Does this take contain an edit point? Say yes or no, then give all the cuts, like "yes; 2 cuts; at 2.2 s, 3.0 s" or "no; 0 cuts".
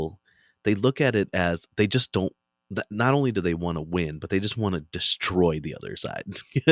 no; 0 cuts